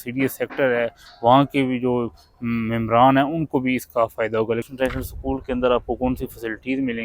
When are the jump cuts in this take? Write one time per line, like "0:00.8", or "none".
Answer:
0:04.7

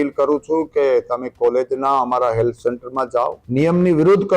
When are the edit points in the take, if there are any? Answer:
0:03.4

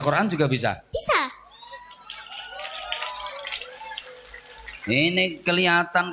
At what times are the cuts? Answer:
none

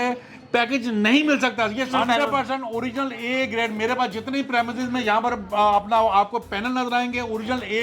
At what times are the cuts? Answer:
0:01.9

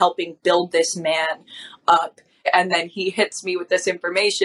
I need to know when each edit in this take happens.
0:02.5

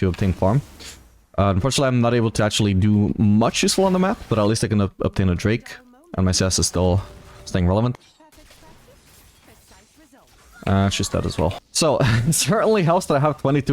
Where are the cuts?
0:07.9
0:11.6

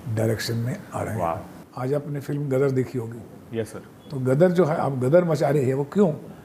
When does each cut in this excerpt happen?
0:01.6

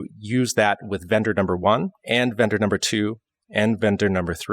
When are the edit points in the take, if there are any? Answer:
0:02.0

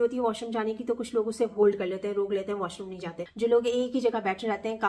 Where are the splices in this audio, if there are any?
0:03.2

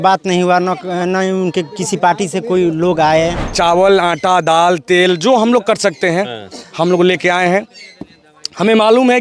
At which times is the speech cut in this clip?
0:03.4

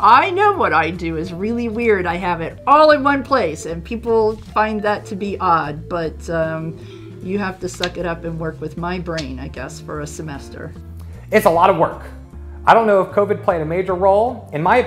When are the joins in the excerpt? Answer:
none

